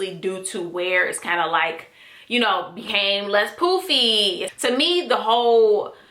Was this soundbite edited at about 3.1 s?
no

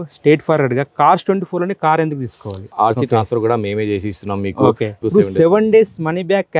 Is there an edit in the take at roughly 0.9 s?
no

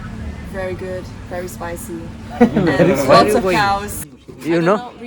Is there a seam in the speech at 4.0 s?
yes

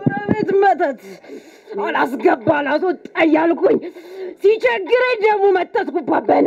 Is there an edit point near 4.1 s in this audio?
no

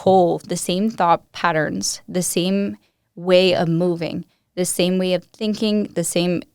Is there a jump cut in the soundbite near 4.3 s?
no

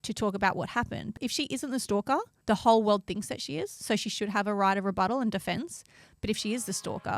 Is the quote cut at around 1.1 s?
yes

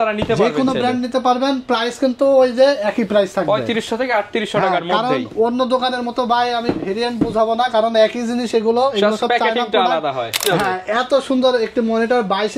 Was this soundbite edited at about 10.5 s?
yes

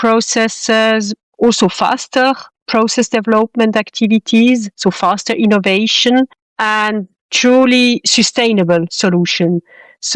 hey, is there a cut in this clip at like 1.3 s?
no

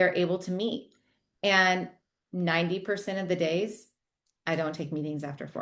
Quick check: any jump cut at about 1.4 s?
no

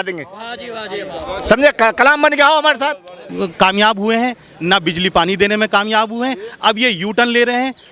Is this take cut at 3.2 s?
yes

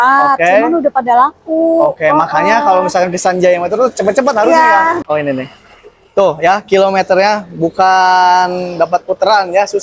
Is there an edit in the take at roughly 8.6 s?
no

